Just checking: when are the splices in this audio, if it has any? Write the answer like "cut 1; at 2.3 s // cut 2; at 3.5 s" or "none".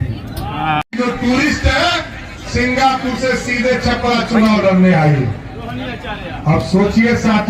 none

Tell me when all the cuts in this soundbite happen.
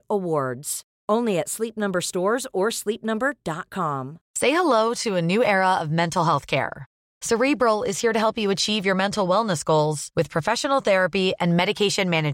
cut 1; at 4.2 s

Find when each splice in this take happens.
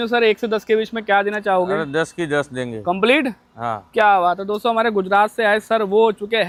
none

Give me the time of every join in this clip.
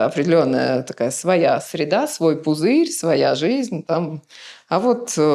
none

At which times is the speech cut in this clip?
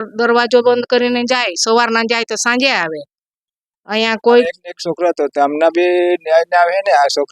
cut 1; at 4.4 s

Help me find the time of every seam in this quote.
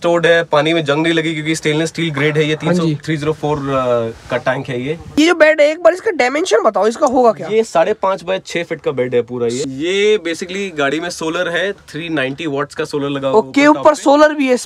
cut 1; at 5.1 s // cut 2; at 9.6 s

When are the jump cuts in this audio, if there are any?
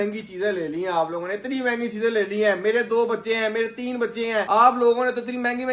none

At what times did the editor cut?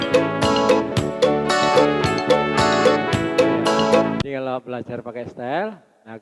cut 1; at 4.2 s

